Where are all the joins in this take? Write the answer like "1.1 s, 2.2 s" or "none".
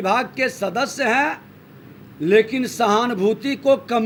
none